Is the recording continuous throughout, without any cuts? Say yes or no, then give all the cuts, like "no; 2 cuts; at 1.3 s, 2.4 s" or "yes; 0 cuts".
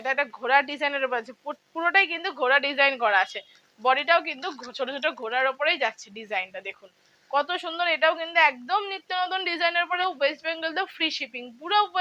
no; 1 cut; at 10.0 s